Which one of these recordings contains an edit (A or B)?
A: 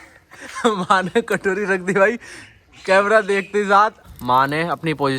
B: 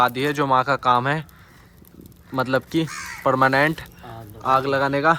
A